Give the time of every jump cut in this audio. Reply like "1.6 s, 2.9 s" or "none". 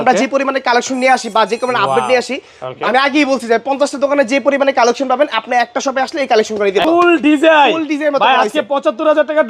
6.8 s